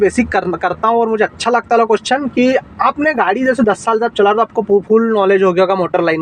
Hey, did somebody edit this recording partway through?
no; 0 cuts

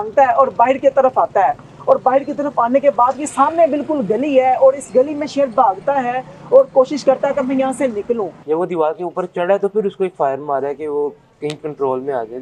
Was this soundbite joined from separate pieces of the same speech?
yes; 1 cut; at 8.4 s

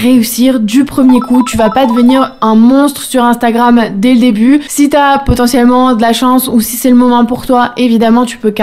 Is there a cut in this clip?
no; 0 cuts

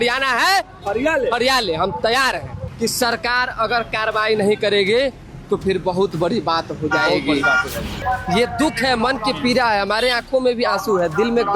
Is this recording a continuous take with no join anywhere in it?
no; 2 cuts; at 2.6 s, 8.0 s

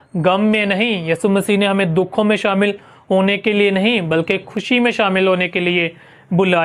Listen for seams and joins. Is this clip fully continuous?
yes; 0 cuts

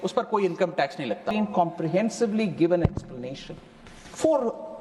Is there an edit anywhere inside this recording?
yes; 1 cut; at 1.3 s

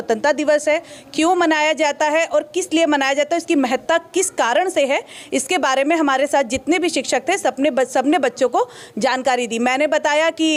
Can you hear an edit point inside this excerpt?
no; 0 cuts

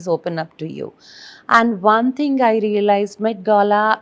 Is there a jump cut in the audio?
no; 0 cuts

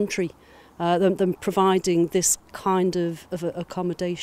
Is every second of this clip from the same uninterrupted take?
yes; 0 cuts

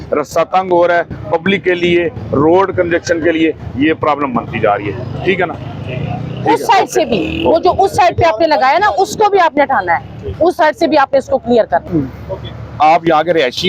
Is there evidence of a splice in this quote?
no; 0 cuts

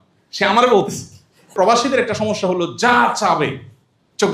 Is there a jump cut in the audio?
yes; 1 cut; at 1.5 s

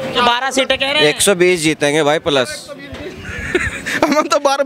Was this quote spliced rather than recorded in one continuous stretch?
no; 0 cuts

